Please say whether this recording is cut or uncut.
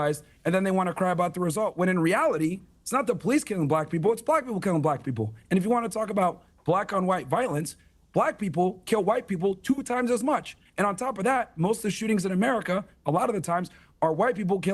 cut